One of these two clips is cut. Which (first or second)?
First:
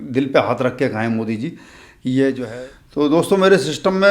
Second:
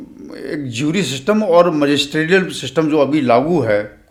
first